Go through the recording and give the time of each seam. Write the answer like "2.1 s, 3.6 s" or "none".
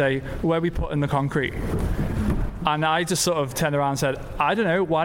none